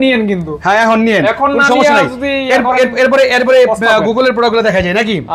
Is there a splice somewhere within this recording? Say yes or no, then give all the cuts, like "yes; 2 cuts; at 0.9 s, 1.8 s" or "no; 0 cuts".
no; 0 cuts